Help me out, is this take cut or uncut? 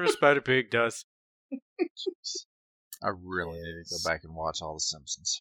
uncut